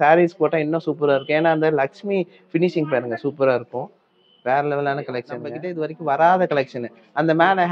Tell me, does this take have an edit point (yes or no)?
yes